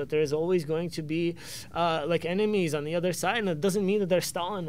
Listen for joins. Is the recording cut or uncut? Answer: uncut